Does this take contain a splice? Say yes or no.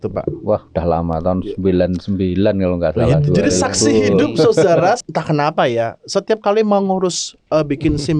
yes